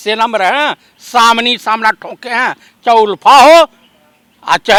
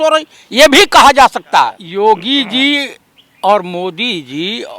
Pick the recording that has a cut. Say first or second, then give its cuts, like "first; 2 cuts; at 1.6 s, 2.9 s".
second; 1 cut; at 1.8 s